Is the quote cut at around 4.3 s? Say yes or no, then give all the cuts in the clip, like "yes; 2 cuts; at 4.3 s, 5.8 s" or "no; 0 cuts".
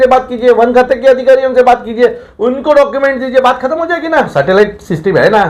yes; 1 cut; at 4.3 s